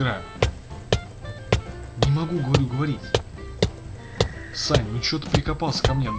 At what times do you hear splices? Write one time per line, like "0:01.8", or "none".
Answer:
none